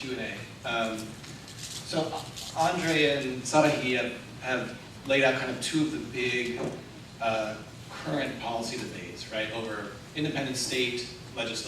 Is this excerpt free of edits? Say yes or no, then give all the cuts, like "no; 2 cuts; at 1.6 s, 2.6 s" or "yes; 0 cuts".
yes; 0 cuts